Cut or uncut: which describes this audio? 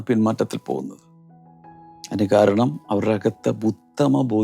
uncut